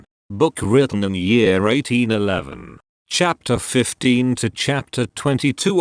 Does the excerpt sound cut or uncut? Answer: cut